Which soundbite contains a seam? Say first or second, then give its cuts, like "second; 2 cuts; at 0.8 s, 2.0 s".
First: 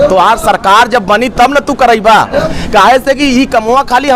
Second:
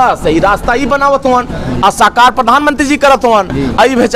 first; 1 cut; at 2.5 s